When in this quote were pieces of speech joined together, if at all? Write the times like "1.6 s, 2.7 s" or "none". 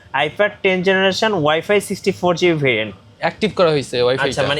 3.1 s